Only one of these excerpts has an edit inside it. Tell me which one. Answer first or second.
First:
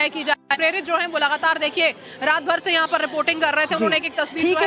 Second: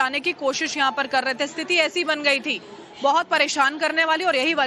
second